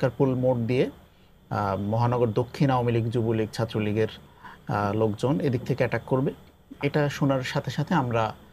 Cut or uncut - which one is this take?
uncut